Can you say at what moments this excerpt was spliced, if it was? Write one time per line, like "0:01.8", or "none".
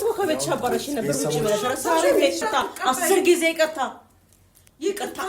0:02.4